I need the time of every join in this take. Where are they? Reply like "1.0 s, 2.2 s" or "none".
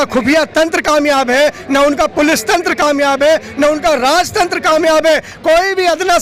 none